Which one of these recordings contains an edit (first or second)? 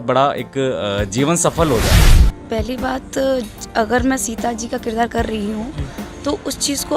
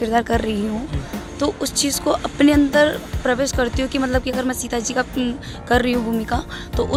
first